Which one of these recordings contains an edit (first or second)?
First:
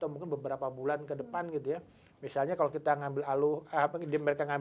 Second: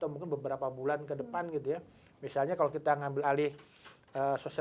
second